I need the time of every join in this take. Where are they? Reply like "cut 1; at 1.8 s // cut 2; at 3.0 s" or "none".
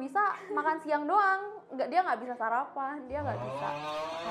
none